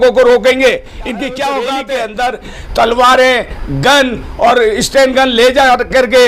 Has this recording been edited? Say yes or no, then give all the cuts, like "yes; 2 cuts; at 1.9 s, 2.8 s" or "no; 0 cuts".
yes; 1 cut; at 1.8 s